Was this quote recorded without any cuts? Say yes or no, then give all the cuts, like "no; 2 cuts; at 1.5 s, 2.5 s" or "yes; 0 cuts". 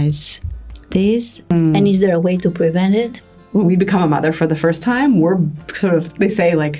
no; 2 cuts; at 1.5 s, 3.3 s